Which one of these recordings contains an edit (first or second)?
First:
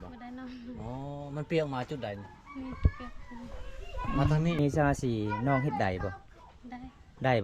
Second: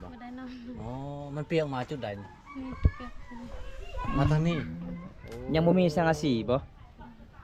first